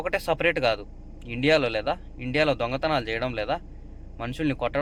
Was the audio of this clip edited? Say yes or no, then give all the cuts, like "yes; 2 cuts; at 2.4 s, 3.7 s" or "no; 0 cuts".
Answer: no; 0 cuts